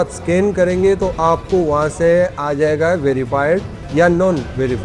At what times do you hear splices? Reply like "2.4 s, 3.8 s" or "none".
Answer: 3.8 s